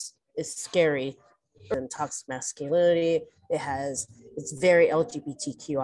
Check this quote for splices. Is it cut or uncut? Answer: cut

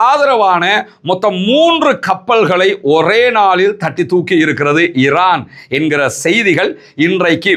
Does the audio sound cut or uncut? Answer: uncut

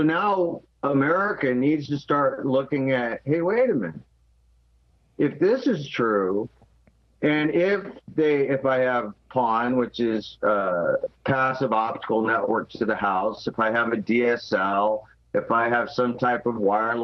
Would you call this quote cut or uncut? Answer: uncut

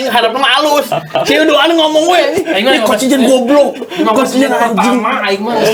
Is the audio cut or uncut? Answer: uncut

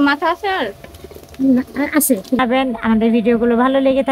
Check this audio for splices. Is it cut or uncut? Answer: cut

